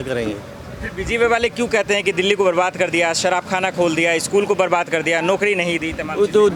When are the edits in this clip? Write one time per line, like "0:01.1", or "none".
none